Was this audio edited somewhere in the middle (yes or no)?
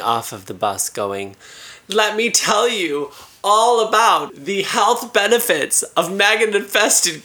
yes